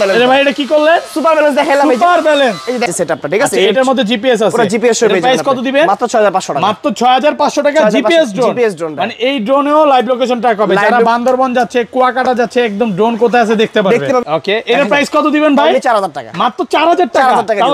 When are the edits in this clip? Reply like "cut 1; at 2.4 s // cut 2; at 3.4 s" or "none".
cut 1; at 2.9 s // cut 2; at 14.2 s